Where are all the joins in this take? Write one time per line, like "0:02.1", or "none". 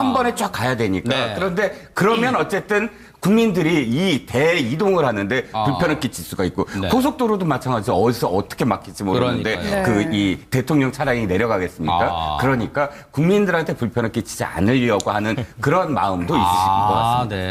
0:01.8